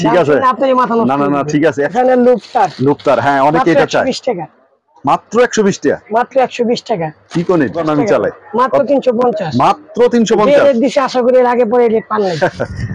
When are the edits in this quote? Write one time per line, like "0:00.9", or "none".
0:01.9
0:07.8